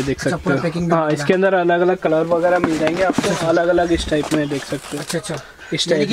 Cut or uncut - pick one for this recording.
uncut